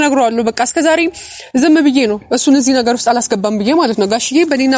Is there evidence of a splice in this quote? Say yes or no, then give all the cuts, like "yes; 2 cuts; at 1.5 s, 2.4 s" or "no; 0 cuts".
no; 0 cuts